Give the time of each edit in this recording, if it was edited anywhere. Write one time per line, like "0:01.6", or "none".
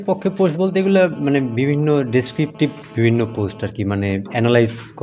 none